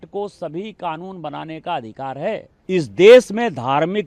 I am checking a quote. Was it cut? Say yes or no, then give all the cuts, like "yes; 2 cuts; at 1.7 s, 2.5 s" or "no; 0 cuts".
yes; 1 cut; at 2.5 s